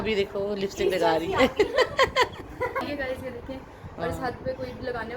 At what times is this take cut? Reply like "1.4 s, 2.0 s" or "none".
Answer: 2.8 s